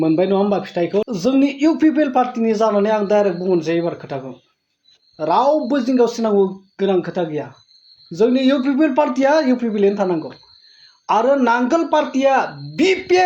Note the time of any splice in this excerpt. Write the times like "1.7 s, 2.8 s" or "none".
1.0 s